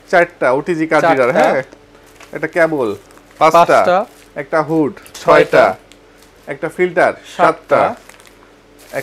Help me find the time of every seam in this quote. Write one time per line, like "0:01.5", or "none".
none